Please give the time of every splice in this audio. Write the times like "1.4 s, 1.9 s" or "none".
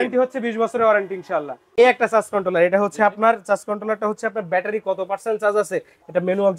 1.7 s